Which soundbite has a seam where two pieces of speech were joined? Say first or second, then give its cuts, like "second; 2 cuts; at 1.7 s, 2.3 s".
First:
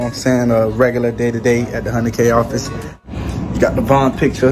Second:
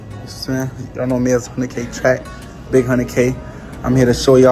first; 1 cut; at 3.0 s